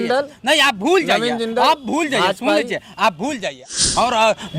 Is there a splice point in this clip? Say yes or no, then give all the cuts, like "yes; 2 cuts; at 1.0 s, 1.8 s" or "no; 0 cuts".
yes; 1 cut; at 3.5 s